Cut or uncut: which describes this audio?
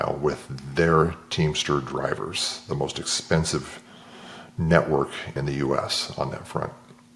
cut